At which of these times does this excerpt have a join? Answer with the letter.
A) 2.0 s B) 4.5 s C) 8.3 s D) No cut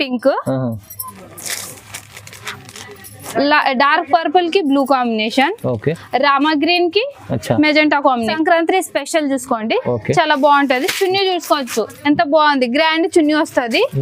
C